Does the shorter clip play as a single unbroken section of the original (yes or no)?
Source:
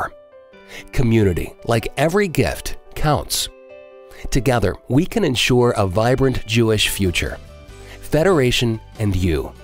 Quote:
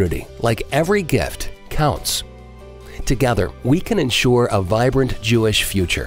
yes